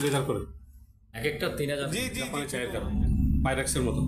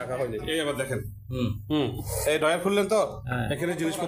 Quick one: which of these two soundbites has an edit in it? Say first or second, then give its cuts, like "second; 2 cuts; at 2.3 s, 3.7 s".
first; 1 cut; at 2.3 s